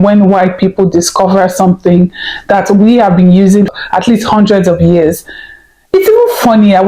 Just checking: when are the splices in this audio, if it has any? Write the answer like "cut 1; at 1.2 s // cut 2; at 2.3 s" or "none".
cut 1; at 3.7 s

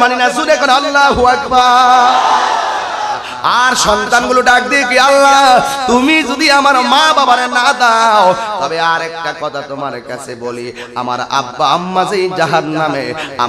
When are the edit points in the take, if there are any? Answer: cut 1; at 3.3 s

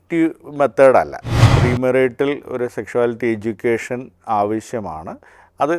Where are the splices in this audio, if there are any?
cut 1; at 1.5 s

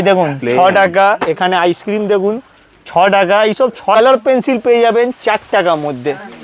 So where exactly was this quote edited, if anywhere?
cut 1; at 3.9 s

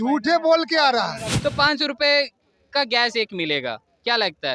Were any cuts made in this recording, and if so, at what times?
cut 1; at 1.3 s

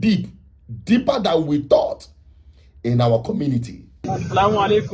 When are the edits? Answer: cut 1; at 4.0 s

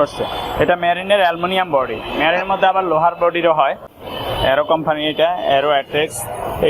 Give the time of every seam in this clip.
cut 1; at 3.9 s

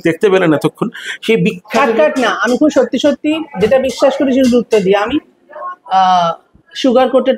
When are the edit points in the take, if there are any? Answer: none

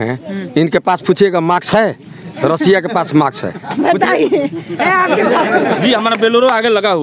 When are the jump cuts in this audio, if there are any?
none

